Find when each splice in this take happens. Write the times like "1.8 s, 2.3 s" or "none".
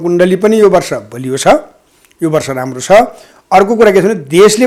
none